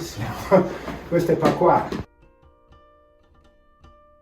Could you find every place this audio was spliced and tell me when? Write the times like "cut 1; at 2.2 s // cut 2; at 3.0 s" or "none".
cut 1; at 2.1 s